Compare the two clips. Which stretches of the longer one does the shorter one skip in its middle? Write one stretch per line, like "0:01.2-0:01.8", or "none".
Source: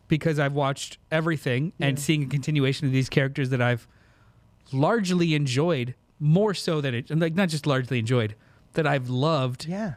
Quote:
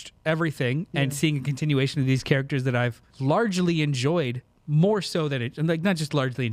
0:03.9-0:04.6